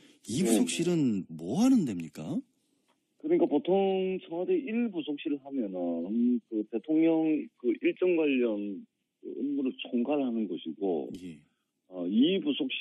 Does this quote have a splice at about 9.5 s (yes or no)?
no